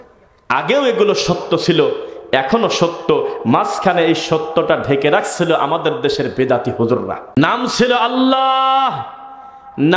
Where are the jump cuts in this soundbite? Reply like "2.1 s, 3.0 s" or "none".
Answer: 7.2 s